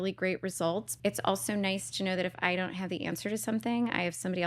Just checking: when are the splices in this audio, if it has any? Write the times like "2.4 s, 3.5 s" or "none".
0.9 s